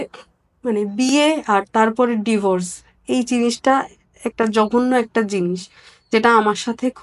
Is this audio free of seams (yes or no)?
yes